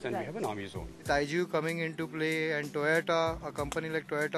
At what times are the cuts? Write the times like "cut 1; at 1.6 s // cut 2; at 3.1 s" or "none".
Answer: cut 1; at 1.0 s